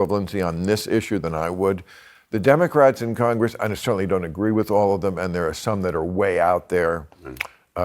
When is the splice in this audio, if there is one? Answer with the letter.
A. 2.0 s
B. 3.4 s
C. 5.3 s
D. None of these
D